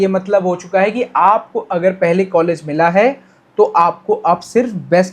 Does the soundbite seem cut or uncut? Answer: uncut